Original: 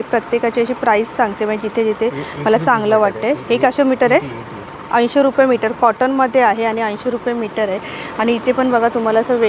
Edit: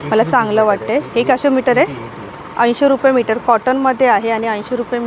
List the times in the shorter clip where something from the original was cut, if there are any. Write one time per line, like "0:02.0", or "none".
none